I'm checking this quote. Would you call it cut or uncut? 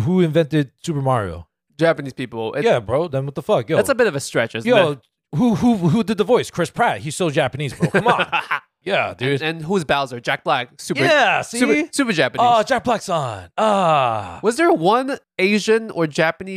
uncut